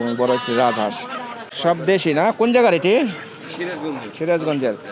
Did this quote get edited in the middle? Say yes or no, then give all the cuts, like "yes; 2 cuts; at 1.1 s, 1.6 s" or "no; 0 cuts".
yes; 1 cut; at 1.4 s